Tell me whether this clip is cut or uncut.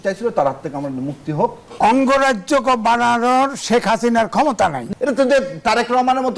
cut